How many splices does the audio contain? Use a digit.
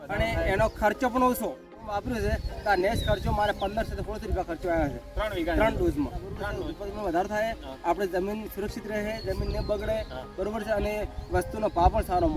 2